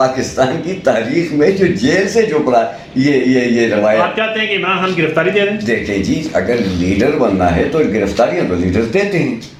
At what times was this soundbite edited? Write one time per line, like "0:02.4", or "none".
none

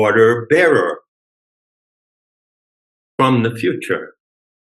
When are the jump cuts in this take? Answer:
none

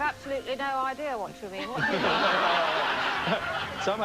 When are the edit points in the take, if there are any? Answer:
0:02.5

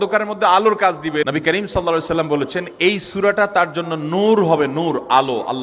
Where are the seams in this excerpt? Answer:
0:01.2

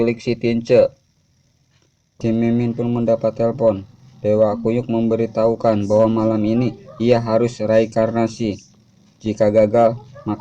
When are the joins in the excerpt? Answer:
0:02.1

